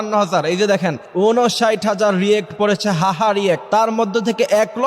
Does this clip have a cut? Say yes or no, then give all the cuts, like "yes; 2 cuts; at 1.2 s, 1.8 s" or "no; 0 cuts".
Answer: yes; 2 cuts; at 1.0 s, 3.6 s